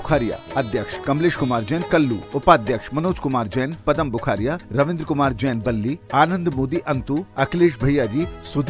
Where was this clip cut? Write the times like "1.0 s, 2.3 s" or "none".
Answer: 0.9 s, 2.2 s